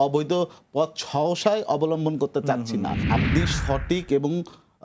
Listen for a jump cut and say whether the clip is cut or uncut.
cut